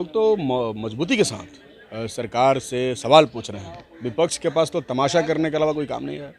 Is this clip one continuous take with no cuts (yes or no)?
yes